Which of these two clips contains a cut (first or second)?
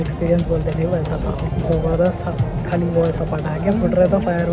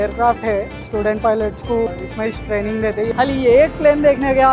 second